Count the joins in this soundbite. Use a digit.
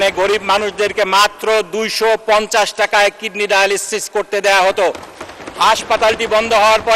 0